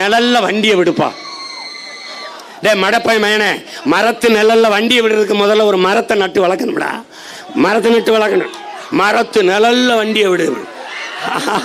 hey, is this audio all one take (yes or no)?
yes